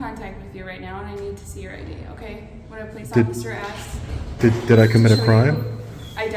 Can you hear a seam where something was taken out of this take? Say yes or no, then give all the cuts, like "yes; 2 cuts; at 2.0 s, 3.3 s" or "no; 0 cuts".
no; 0 cuts